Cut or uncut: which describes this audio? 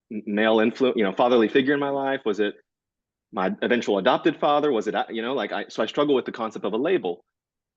uncut